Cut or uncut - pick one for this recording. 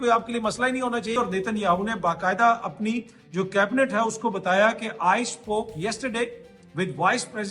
cut